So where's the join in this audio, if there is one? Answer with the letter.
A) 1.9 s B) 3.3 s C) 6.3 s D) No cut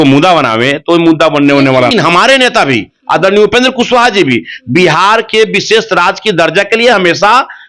A